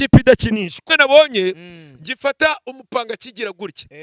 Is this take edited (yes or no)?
yes